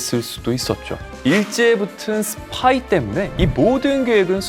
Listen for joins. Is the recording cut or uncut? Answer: cut